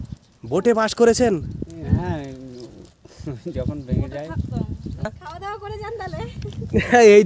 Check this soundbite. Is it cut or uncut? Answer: cut